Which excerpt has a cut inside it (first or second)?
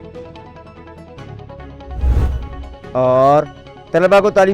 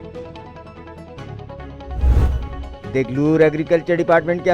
first